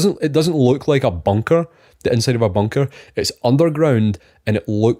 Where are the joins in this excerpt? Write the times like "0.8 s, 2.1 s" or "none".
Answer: none